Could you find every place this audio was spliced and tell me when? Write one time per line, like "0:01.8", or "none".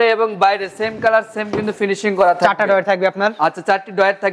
none